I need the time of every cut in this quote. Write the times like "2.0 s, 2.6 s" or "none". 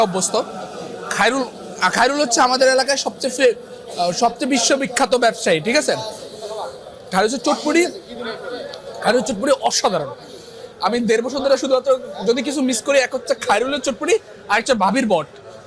none